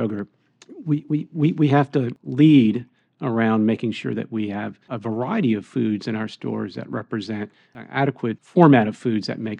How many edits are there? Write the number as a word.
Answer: two